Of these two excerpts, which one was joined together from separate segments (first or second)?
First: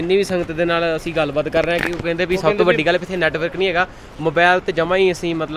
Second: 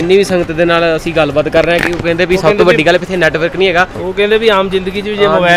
second